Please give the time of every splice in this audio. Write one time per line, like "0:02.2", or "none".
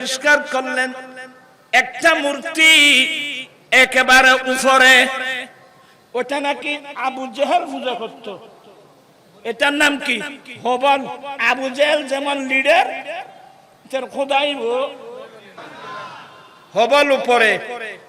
0:11.3
0:15.8